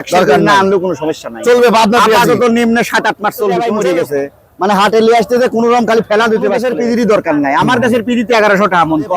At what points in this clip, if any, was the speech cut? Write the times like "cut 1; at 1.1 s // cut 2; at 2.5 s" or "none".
cut 1; at 3.4 s // cut 2; at 6.1 s